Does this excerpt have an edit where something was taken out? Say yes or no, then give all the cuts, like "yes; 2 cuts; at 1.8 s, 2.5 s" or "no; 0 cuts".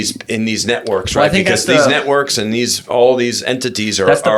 no; 0 cuts